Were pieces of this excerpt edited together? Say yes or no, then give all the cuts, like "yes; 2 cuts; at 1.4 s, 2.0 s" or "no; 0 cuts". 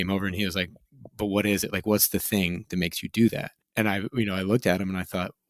no; 0 cuts